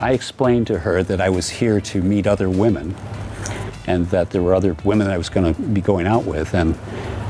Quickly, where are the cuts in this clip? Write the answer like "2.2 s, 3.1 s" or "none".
none